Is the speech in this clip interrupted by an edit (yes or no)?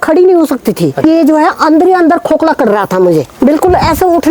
yes